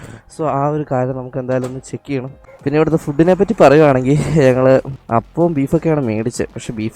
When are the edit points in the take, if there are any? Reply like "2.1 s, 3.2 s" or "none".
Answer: 2.4 s